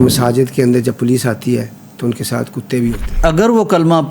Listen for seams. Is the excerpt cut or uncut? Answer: cut